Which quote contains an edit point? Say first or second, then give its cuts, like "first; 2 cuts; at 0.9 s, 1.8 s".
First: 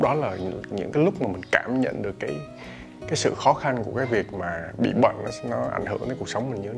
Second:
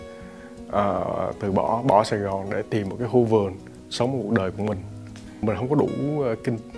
second; 1 cut; at 5.4 s